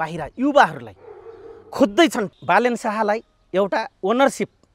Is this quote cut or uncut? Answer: cut